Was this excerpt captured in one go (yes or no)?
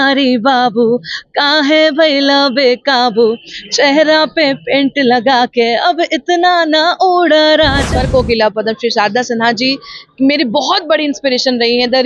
no